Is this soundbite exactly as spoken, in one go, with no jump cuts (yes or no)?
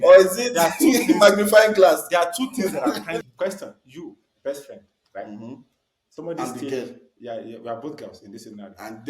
no